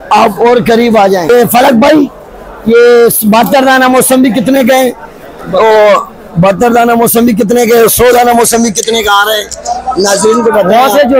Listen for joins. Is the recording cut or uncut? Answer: uncut